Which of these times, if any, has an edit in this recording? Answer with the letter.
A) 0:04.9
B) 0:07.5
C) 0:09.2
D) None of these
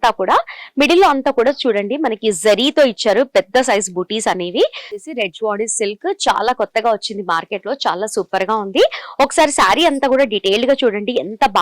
A